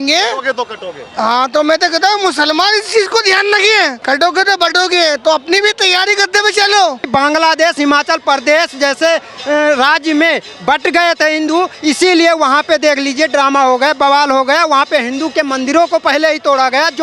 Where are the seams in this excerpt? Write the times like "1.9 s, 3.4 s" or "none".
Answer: 4.0 s, 7.1 s